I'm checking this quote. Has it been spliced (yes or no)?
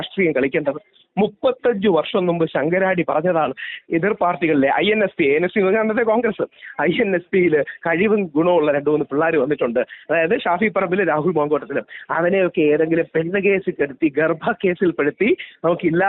no